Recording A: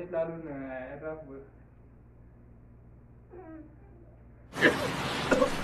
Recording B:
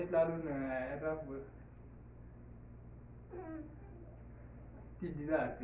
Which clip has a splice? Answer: B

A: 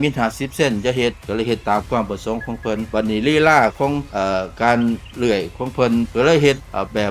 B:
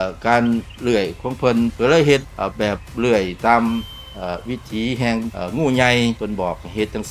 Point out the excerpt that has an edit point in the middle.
A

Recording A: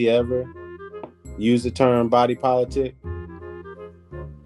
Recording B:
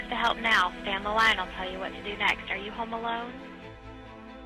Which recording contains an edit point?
A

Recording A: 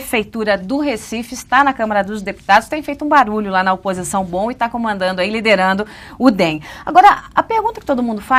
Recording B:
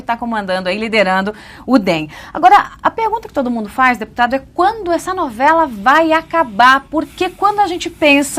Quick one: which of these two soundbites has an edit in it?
B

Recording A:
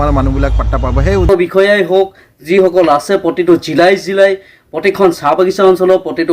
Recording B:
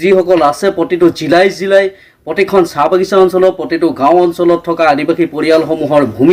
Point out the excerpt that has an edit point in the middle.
A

